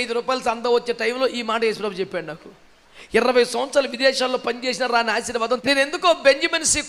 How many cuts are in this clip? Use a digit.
1